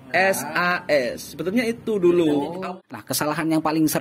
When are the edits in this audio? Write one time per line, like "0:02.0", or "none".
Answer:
0:02.6